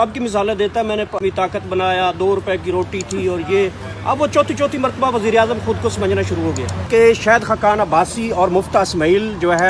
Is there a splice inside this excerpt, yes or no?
yes